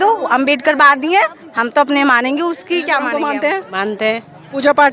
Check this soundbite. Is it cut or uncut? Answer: cut